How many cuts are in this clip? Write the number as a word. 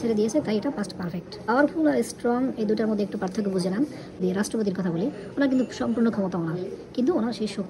two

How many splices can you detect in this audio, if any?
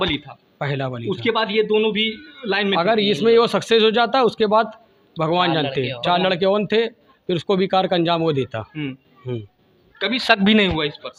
zero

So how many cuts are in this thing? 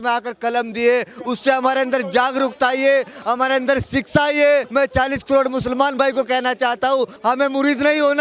two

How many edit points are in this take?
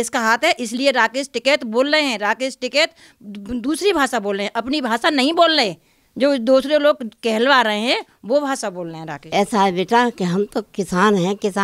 one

